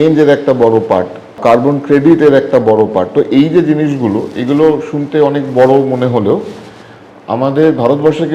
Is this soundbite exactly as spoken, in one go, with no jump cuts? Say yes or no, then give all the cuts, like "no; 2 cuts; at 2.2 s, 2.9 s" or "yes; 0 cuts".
no; 1 cut; at 1.4 s